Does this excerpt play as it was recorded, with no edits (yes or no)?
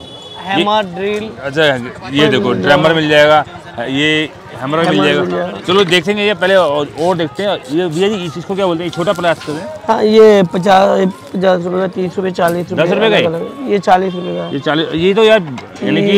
yes